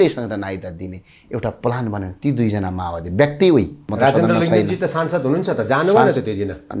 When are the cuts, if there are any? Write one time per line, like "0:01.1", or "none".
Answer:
0:03.8